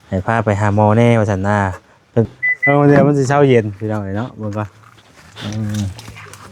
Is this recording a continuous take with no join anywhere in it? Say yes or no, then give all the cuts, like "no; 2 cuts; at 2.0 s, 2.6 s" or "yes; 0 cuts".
no; 1 cut; at 2.3 s